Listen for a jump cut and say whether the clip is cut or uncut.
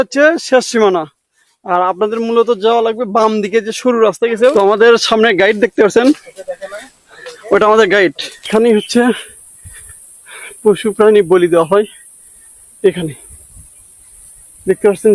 cut